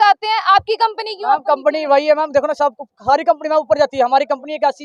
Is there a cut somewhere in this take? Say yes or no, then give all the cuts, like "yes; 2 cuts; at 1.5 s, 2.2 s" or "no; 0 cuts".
no; 0 cuts